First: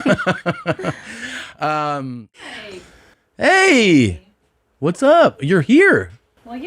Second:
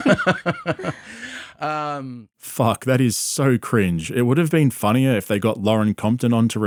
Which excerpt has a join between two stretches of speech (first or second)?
first